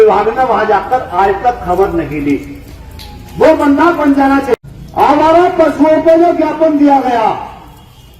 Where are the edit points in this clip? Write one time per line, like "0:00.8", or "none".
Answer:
0:04.6